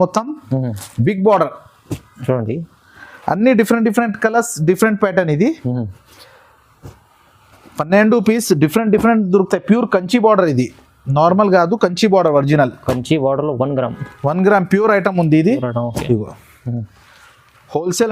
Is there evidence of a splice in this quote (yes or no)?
no